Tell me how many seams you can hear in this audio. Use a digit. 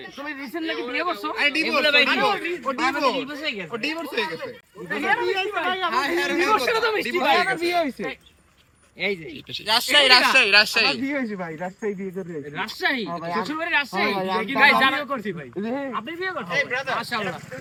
0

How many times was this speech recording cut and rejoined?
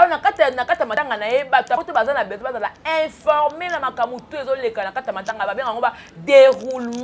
2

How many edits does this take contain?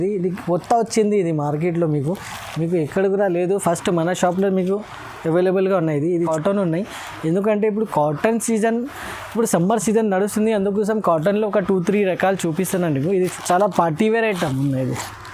2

